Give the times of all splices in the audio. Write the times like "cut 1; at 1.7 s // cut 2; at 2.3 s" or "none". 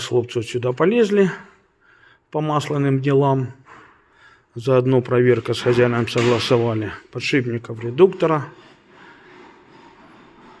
none